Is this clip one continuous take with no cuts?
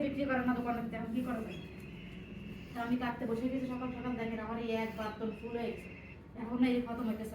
yes; 0 cuts

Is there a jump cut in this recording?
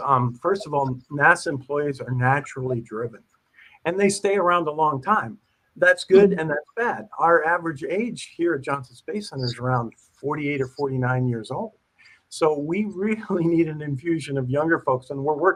no; 0 cuts

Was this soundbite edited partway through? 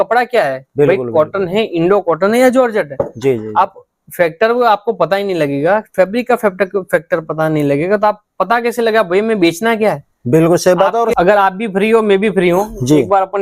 yes; 1 cut; at 11.1 s

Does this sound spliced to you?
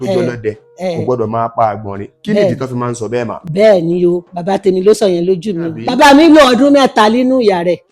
yes; 1 cut; at 5.8 s

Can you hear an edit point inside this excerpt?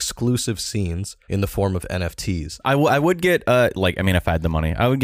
yes; 2 cuts; at 1.1 s, 2.6 s

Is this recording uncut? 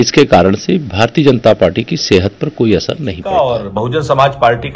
no; 1 cut; at 3.1 s

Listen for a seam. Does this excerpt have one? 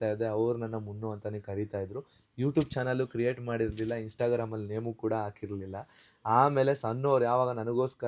no; 0 cuts

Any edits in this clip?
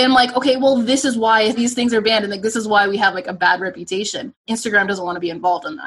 yes; 2 cuts; at 1.6 s, 4.4 s

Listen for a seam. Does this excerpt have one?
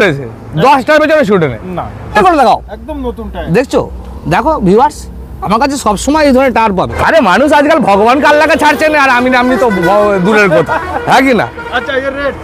yes; 2 cuts; at 2.2 s, 6.9 s

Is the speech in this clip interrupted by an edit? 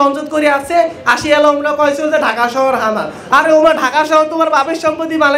no; 0 cuts

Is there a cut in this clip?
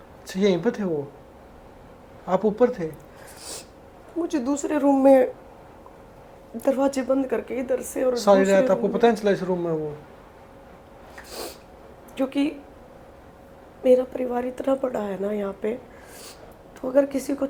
no; 0 cuts

